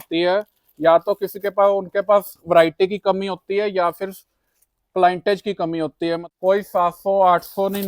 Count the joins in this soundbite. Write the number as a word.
one